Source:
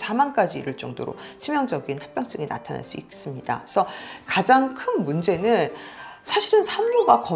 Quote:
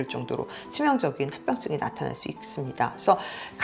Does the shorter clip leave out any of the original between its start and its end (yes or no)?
no